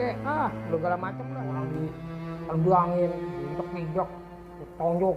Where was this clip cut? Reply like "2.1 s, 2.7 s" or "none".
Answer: 1.2 s